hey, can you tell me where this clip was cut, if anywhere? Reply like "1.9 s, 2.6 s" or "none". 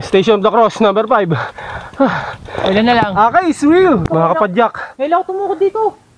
4.0 s

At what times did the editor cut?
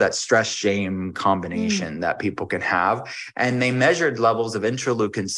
none

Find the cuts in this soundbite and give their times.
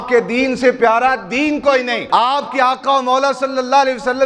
2.0 s

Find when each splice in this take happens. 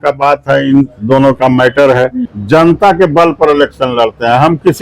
2.3 s

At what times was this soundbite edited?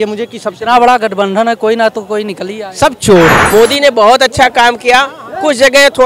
3.4 s

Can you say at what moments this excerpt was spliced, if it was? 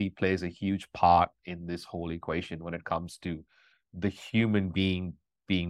none

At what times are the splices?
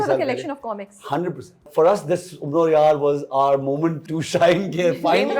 1.7 s, 4.1 s

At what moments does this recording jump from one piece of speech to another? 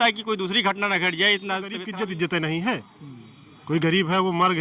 1.8 s

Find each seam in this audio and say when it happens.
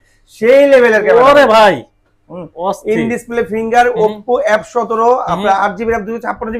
none

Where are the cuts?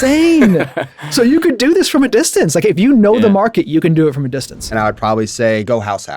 4.8 s

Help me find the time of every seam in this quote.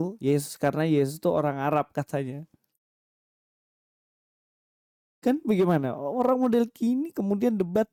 none

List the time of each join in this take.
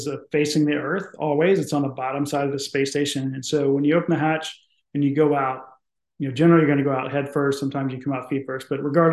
none

